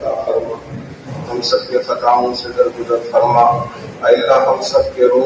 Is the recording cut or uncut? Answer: cut